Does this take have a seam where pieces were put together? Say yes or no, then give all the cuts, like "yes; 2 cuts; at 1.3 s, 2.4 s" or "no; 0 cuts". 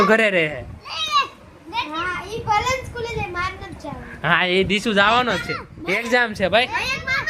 no; 0 cuts